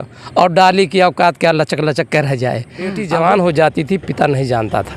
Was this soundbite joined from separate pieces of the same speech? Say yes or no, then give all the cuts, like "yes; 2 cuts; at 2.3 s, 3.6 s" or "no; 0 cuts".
yes; 1 cut; at 3.0 s